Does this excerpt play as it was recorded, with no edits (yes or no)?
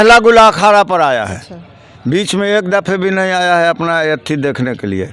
yes